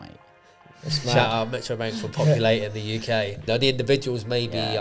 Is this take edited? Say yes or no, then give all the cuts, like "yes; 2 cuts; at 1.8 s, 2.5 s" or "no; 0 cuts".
yes; 1 cut; at 3.5 s